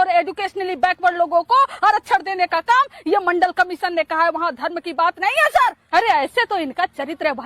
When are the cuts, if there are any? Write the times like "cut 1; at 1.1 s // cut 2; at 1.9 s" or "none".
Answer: cut 1; at 5.8 s